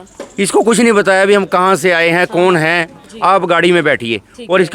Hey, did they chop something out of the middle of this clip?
no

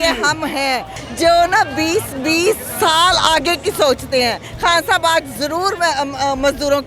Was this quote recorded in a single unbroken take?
no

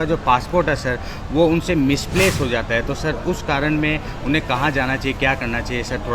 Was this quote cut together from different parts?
no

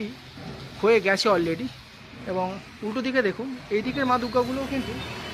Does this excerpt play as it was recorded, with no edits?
yes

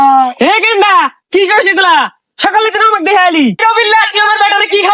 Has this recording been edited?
yes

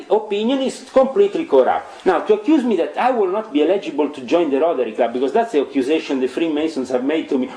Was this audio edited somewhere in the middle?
no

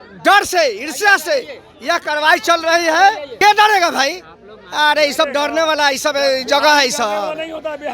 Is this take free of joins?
no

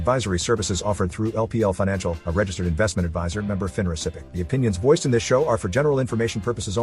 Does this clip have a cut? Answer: yes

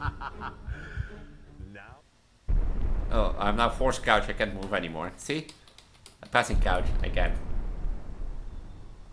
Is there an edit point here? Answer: yes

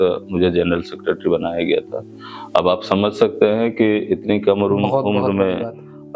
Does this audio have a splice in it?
no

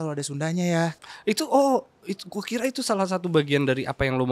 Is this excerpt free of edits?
no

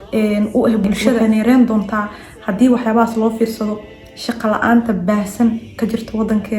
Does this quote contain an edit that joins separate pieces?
yes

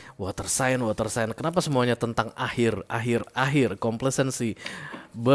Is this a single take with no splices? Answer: yes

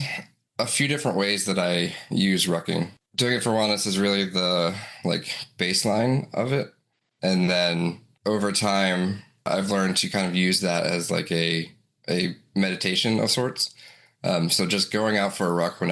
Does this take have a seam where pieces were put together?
yes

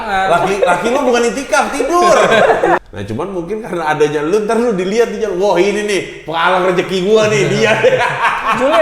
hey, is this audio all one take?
no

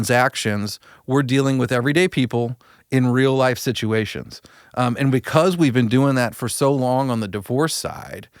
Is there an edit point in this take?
no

